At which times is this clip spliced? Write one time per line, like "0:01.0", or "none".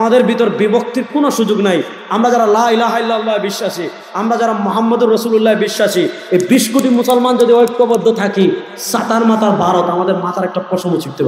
none